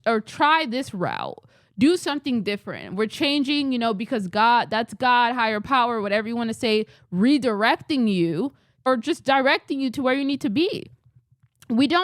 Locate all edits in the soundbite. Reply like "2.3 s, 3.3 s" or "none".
8.7 s